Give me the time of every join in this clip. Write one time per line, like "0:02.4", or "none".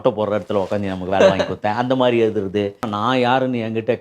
0:02.9